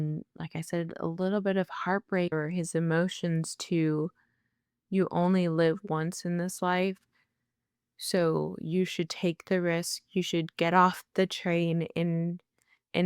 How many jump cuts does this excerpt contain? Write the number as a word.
one